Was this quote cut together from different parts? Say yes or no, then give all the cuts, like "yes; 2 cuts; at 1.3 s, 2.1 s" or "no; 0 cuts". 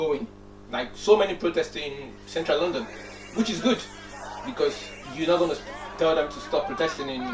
no; 0 cuts